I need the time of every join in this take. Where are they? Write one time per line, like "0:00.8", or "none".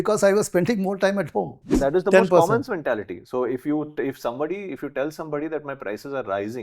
0:01.7